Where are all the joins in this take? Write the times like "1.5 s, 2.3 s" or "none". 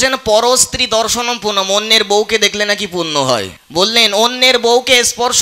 3.6 s